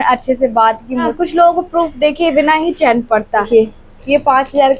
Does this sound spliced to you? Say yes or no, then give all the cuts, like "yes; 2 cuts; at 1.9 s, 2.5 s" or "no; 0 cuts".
yes; 2 cuts; at 1.1 s, 3.5 s